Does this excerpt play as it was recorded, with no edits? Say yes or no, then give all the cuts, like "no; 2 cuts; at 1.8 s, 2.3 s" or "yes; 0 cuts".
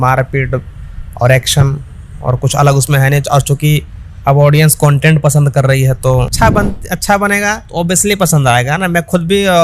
no; 1 cut; at 6.3 s